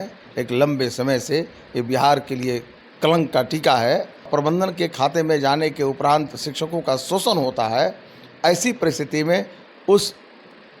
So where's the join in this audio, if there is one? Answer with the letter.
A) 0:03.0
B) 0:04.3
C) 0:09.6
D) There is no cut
B